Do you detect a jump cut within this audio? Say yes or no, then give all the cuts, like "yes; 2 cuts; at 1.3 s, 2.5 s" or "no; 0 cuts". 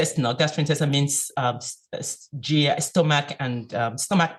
no; 0 cuts